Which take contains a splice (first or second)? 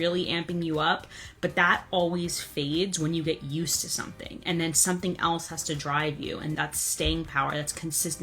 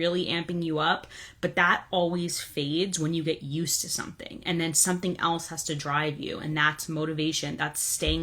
first